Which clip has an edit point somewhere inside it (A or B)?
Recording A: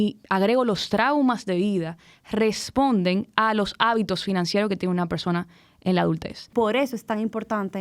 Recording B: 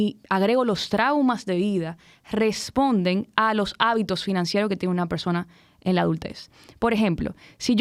A